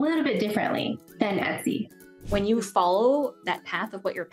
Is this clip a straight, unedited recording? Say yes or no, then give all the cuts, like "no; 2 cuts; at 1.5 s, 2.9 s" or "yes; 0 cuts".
no; 2 cuts; at 1.0 s, 2.2 s